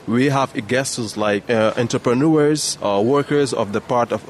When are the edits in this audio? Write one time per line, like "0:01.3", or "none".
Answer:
0:01.4
0:02.7